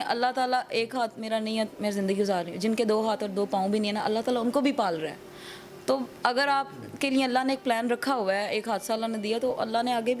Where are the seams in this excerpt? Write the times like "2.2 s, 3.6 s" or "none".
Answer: none